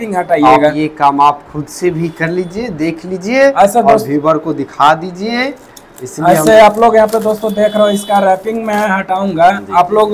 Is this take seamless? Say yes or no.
yes